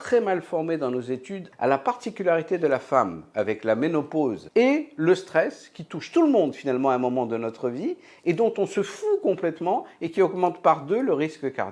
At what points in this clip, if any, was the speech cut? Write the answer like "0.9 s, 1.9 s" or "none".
1.5 s, 4.4 s

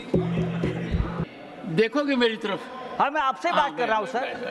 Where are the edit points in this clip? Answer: 1.2 s

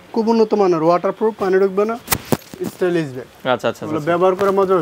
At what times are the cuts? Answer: none

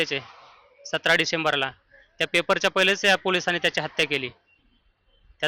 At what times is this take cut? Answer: none

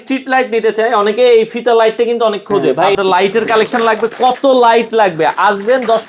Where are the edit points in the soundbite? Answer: 2.9 s

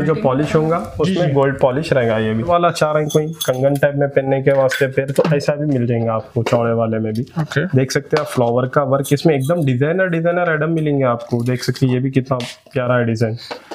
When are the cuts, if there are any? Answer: 2.5 s

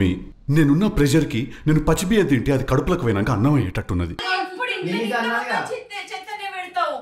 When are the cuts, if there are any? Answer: 4.2 s

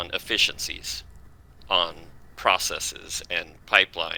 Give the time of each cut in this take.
none

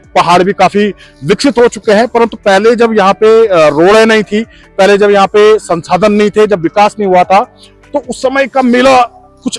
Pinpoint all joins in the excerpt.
none

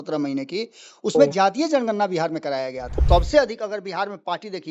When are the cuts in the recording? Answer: 3.0 s

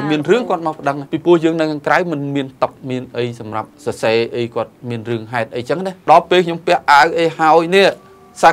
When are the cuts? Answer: 1.1 s, 3.7 s, 5.9 s

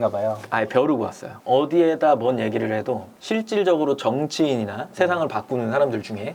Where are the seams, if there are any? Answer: 1.3 s, 3.1 s

